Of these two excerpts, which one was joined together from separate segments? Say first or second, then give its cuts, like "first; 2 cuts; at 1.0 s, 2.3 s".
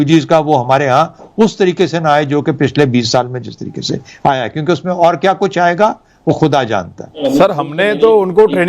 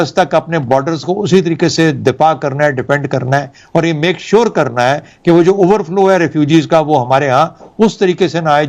first; 1 cut; at 7.2 s